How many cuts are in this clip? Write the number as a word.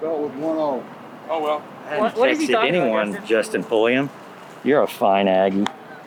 zero